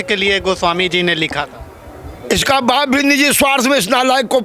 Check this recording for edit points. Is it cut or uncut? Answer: uncut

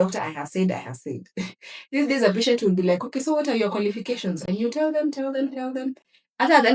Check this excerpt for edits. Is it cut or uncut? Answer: uncut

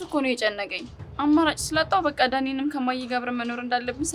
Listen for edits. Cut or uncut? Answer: uncut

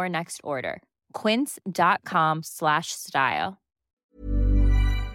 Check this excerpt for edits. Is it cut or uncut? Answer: cut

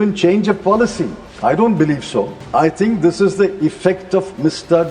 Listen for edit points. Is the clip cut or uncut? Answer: cut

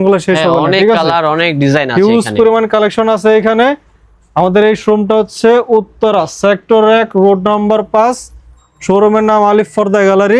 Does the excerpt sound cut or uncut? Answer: uncut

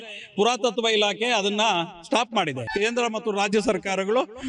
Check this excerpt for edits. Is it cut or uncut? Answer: cut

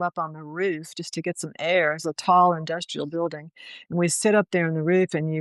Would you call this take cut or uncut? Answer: uncut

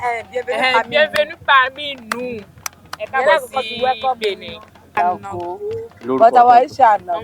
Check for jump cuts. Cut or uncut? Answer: cut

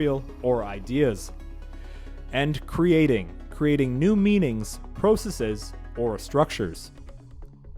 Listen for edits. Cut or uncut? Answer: cut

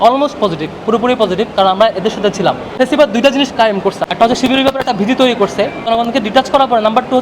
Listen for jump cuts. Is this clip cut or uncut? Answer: cut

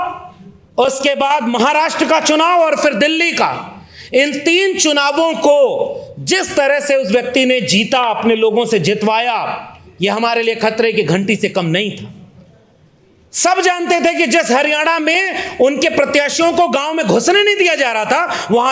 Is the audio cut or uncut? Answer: uncut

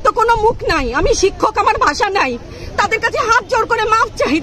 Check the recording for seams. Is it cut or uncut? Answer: uncut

